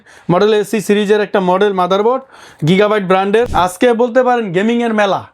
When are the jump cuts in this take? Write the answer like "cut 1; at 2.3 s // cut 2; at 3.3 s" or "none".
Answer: cut 1; at 3.5 s